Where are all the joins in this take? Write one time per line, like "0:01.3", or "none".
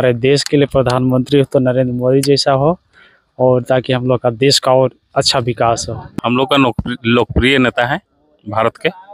0:06.0